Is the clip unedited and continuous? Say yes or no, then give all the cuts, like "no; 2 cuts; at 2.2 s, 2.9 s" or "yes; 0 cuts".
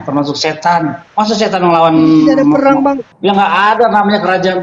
no; 2 cuts; at 1.0 s, 3.1 s